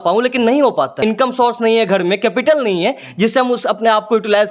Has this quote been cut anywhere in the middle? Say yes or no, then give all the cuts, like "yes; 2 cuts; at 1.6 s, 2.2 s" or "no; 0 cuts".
yes; 1 cut; at 1.0 s